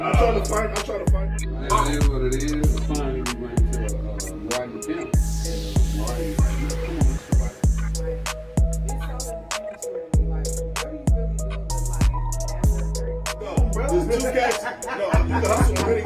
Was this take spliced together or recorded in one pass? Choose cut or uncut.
uncut